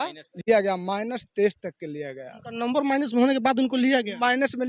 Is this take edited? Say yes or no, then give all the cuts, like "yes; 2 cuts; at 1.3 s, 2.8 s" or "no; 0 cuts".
no; 0 cuts